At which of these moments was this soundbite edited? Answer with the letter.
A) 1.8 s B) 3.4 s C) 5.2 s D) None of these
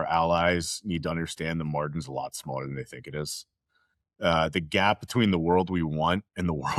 D